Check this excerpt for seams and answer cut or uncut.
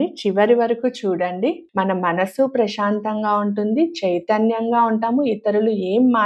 cut